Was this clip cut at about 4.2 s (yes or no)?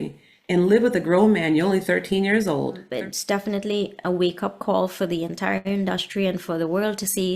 no